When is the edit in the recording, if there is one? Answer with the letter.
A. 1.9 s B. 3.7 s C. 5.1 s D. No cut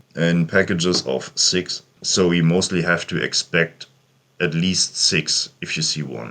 A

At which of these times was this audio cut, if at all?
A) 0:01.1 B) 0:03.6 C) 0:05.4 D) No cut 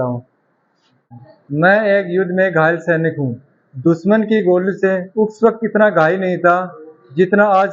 A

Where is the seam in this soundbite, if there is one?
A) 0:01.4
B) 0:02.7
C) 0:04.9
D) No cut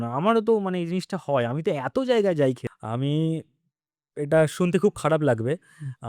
B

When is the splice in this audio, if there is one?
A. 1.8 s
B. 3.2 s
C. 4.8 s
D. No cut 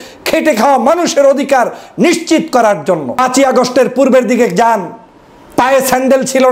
B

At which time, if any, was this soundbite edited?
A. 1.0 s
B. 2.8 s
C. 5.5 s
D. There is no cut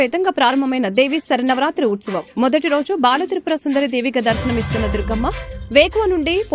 D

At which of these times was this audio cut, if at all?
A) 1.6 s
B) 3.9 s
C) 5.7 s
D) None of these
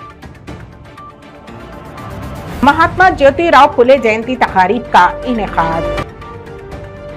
A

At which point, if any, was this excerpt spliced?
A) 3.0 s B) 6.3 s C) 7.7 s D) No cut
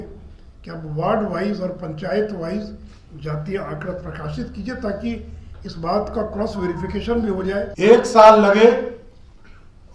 C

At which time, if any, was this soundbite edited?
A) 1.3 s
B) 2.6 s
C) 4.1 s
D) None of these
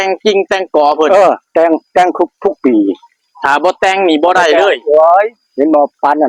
D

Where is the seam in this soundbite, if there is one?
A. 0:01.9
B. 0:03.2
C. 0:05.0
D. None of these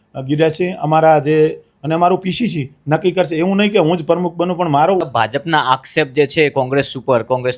C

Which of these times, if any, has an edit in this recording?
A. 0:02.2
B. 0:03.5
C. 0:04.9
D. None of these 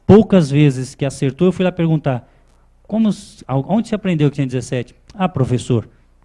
A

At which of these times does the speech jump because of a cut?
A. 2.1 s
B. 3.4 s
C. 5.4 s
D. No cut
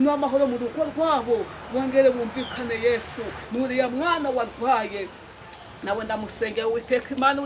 B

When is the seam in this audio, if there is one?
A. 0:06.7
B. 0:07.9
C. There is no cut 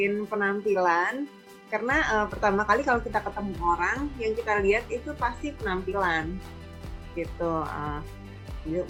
C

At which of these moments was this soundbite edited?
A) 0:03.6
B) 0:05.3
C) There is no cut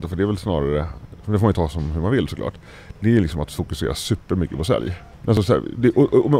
B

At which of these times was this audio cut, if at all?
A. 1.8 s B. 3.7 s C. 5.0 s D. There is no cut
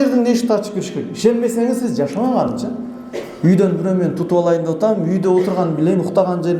D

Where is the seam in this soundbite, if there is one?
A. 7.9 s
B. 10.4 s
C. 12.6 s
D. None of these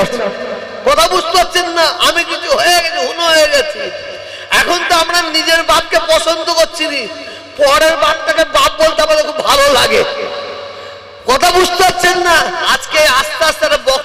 C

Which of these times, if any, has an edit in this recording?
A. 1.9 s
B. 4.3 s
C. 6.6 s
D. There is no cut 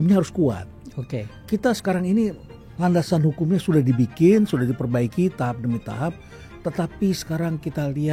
D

